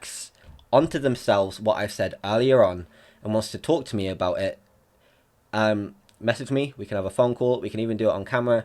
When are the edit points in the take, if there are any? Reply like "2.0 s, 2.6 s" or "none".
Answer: none